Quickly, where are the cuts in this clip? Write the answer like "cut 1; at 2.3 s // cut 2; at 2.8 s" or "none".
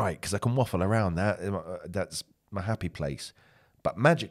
none